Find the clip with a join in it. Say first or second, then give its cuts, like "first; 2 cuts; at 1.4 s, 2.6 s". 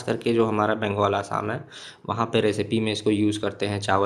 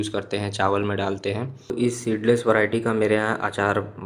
second; 1 cut; at 1.7 s